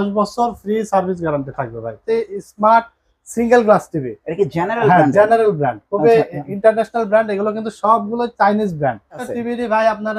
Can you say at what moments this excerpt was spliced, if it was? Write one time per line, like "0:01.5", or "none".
0:01.9
0:09.2